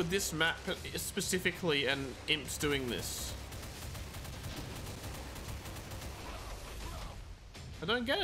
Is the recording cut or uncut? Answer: uncut